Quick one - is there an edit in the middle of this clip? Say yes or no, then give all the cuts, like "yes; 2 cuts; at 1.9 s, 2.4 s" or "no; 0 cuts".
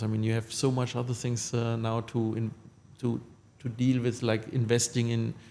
no; 0 cuts